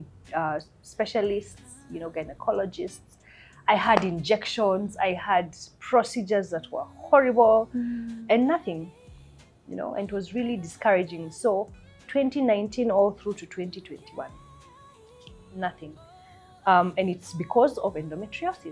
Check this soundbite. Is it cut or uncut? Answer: uncut